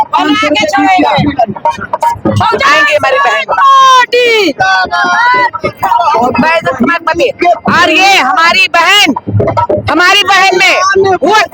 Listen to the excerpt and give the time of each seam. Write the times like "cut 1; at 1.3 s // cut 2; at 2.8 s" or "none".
none